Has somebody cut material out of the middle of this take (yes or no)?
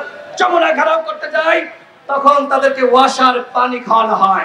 no